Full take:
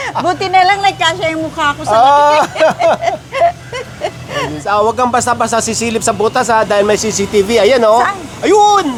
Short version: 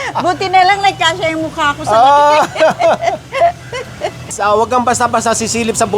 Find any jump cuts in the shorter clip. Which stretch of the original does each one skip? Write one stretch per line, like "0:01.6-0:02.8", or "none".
0:04.3-0:04.6